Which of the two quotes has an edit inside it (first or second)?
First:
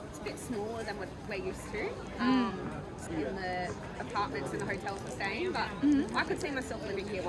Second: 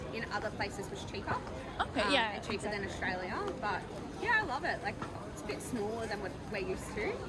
first